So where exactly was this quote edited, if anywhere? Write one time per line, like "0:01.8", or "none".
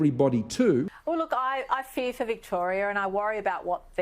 0:00.9